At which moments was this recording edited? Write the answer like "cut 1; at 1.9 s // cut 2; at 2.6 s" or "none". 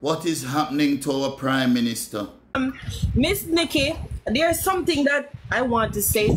cut 1; at 2.4 s

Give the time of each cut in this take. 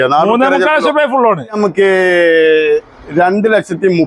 cut 1; at 1.6 s

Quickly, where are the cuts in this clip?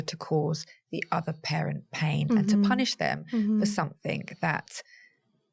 none

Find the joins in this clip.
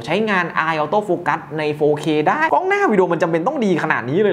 cut 1; at 2.4 s

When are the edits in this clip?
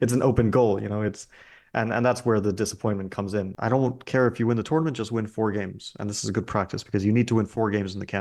cut 1; at 3.5 s

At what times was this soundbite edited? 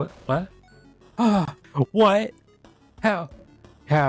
cut 1; at 1.6 s

